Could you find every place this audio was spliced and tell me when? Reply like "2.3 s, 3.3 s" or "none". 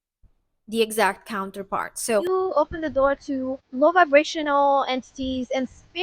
2.2 s, 3.6 s